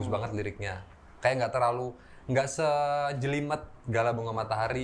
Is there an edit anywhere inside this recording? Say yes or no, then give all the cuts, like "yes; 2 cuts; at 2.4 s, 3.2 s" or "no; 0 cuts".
no; 0 cuts